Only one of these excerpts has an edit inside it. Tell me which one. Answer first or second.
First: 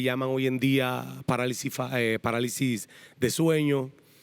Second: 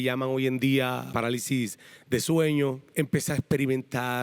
second